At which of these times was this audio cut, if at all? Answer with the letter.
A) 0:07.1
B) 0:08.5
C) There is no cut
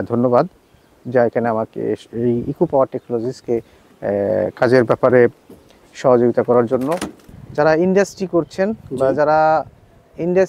A